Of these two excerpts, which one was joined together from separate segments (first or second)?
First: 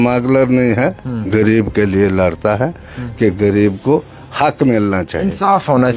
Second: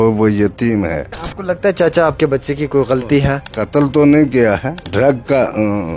second